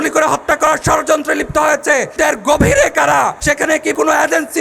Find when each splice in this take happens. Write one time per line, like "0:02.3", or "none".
0:02.1
0:03.9